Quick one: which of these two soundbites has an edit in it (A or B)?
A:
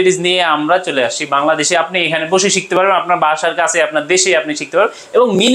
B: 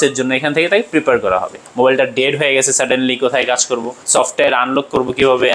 B